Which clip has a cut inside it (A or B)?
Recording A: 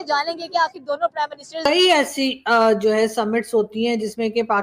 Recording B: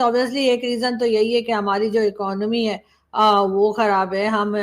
A